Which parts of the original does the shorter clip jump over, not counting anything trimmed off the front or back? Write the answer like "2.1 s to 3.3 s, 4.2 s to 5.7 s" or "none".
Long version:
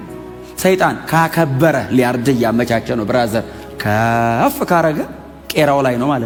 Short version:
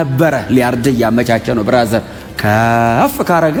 none